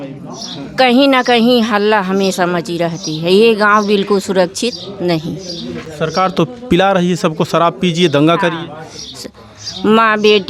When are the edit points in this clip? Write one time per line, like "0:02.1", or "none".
none